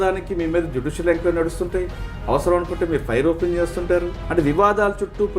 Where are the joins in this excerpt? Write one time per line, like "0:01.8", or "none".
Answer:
0:04.2